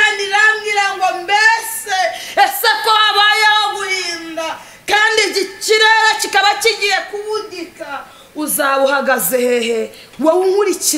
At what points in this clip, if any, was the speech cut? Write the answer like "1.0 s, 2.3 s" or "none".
10.0 s